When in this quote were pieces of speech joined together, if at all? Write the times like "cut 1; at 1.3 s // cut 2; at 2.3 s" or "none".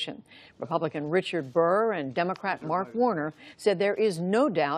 cut 1; at 2.0 s